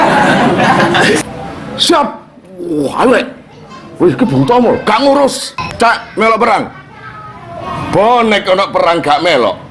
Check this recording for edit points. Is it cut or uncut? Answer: cut